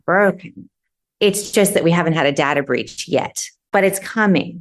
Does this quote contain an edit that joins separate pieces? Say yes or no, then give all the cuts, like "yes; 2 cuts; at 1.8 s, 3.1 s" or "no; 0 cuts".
yes; 1 cut; at 3.7 s